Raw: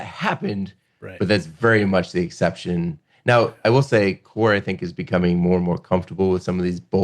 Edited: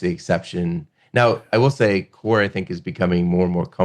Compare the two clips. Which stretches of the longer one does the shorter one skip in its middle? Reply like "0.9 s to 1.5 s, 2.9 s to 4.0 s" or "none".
none